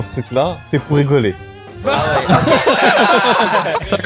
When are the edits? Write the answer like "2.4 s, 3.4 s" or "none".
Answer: none